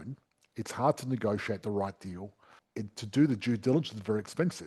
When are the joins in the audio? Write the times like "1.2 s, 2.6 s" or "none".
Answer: 2.6 s